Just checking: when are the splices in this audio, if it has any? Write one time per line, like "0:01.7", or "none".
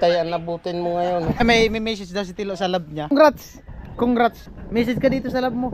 0:01.4
0:03.1
0:04.5